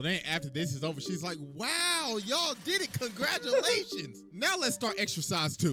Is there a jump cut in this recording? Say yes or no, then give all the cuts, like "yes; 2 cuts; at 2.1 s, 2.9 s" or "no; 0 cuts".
no; 0 cuts